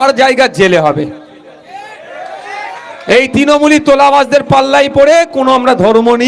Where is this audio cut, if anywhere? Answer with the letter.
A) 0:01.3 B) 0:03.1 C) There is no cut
B